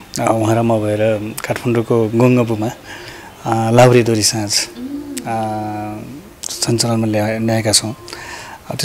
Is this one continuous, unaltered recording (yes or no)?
yes